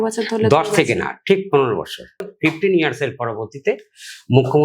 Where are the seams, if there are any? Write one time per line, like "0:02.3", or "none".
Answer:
0:02.3